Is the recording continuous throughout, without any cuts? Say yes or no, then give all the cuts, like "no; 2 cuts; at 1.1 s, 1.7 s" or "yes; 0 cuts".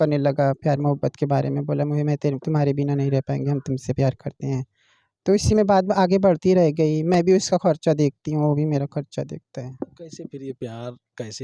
yes; 0 cuts